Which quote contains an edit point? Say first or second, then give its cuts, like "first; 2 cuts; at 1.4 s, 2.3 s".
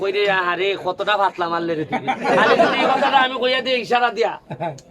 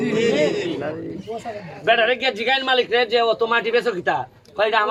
first; 1 cut; at 2.8 s